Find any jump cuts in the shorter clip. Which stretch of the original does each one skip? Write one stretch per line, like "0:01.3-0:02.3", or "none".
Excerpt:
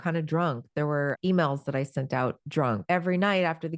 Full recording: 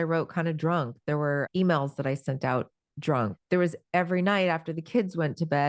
0:03.0-0:03.7